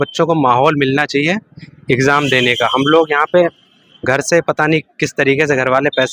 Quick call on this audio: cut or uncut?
uncut